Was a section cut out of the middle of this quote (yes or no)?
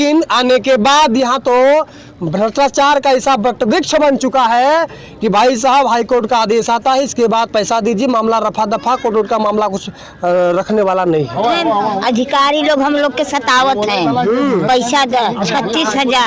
yes